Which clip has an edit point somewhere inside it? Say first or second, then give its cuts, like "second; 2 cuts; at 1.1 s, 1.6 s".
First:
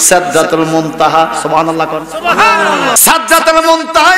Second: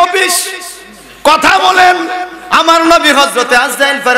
first; 1 cut; at 3.0 s